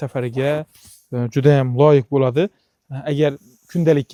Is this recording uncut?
yes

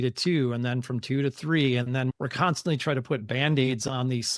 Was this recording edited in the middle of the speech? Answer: no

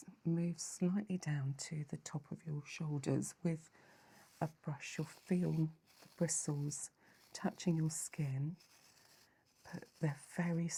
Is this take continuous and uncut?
yes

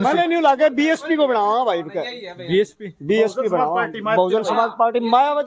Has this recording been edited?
no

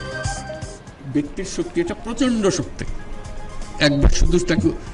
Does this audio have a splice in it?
yes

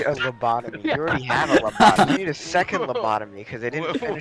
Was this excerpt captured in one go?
yes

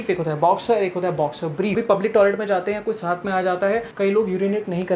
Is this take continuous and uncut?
no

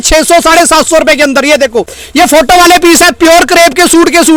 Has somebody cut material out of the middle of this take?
no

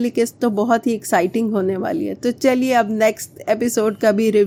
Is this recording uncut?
yes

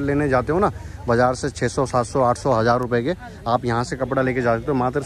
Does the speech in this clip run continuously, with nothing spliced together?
yes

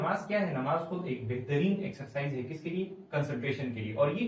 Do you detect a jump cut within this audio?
no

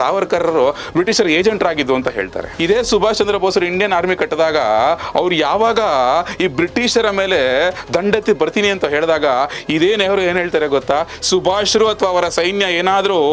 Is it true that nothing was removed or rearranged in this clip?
no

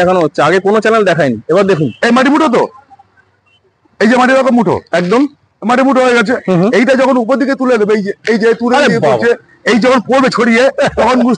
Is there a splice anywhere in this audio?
no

